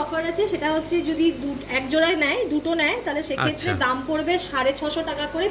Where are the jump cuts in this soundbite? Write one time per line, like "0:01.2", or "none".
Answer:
none

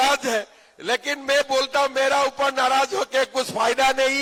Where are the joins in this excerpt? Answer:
none

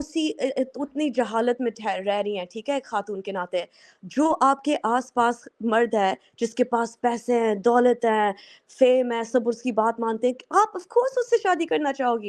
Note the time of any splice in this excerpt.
none

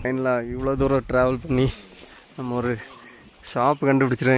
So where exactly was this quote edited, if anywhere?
none

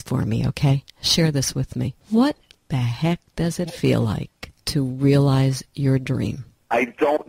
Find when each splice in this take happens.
none

